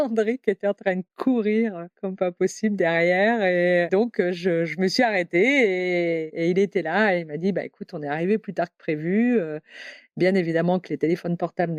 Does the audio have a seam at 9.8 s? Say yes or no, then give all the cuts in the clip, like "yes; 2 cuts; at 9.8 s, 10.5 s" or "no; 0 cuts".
no; 2 cuts; at 3.9 s, 6.3 s